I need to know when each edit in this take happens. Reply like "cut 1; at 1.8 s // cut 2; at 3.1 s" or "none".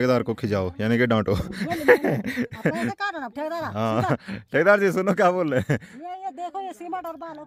none